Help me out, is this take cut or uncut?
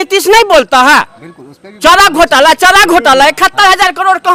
uncut